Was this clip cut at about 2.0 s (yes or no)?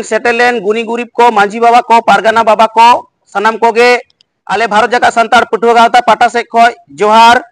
no